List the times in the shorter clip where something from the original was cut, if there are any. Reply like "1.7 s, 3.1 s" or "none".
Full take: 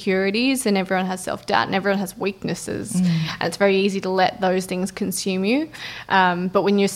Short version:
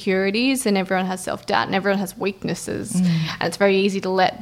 none